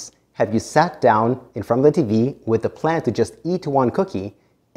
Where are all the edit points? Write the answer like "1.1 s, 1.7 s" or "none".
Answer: none